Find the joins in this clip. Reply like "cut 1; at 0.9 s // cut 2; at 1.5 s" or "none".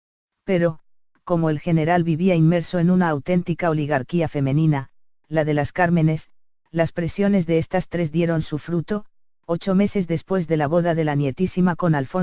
cut 1; at 10.1 s